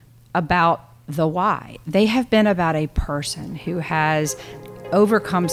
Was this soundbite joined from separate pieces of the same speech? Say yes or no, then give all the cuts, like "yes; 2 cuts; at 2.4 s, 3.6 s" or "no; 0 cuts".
no; 0 cuts